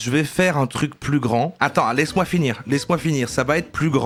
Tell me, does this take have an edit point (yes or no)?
no